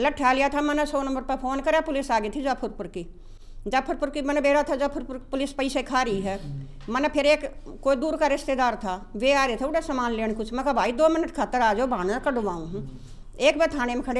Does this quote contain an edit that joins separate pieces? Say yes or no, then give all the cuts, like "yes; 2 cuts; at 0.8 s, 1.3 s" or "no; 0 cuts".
no; 0 cuts